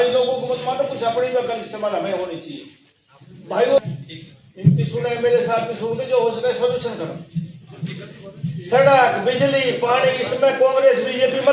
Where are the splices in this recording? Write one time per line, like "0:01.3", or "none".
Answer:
0:03.8